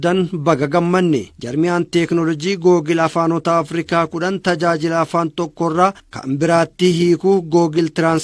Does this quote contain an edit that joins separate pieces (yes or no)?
yes